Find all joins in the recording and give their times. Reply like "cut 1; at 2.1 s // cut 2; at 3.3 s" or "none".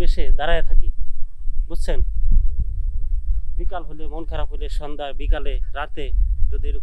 none

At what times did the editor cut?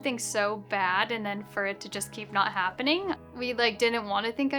cut 1; at 3.2 s

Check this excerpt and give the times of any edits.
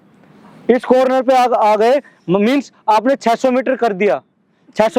none

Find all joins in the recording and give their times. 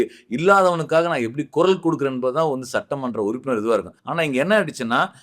cut 1; at 4.0 s

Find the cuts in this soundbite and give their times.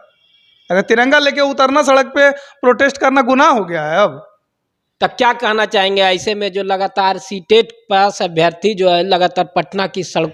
none

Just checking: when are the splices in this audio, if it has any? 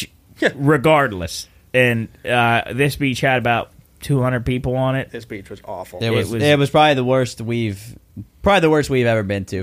cut 1; at 1.1 s

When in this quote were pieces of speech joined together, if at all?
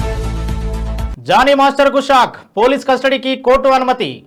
none

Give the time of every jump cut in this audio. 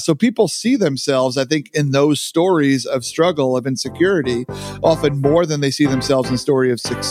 none

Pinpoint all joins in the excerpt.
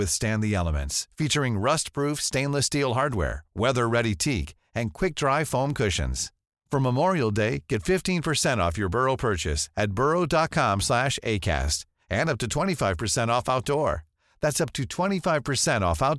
none

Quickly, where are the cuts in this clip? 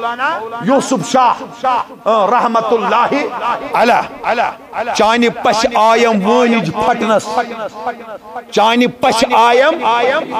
none

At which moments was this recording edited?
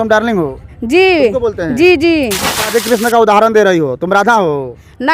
cut 1; at 2.5 s

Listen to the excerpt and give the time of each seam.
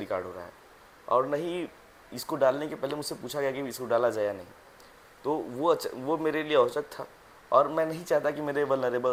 none

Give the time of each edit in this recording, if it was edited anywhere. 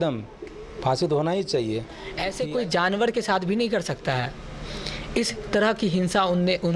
cut 1; at 1.8 s

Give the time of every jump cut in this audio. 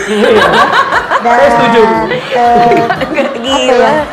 none

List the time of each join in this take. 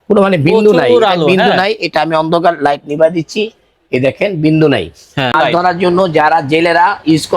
cut 1; at 5.3 s

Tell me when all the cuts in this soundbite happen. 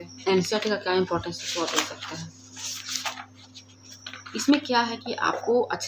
none

